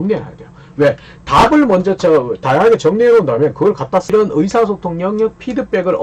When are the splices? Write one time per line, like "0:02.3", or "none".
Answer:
0:04.1